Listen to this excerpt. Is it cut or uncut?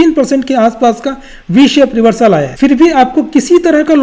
cut